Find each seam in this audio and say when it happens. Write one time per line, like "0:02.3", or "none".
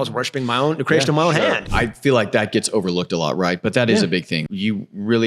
0:01.7
0:04.5

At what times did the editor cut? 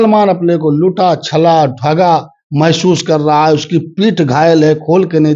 none

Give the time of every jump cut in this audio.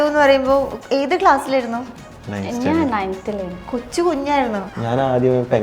0:04.6

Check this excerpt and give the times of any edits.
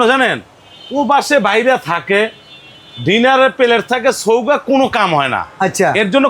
none

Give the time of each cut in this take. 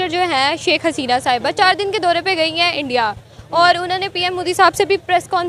none

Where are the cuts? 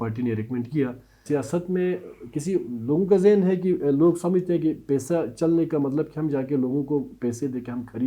0:01.2

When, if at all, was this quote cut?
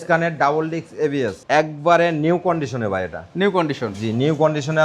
0:01.4

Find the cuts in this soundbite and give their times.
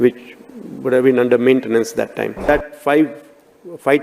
0:02.4

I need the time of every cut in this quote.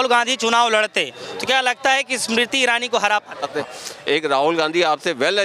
0:03.5

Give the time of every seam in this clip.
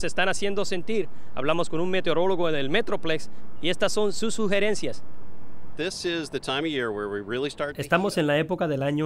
none

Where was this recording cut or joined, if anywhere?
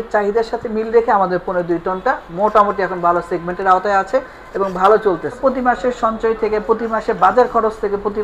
0:05.4

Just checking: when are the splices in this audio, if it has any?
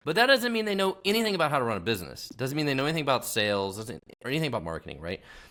none

